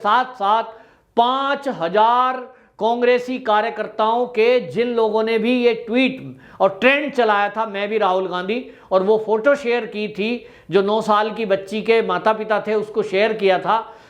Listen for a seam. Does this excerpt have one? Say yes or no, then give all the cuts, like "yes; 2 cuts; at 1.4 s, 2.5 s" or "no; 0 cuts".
no; 0 cuts